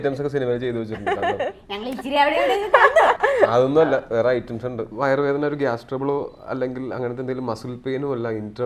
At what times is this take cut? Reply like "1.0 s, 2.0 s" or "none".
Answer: 3.2 s, 4.9 s